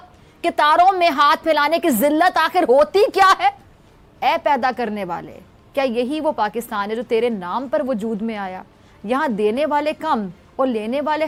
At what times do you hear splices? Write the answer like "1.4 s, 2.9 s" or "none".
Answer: none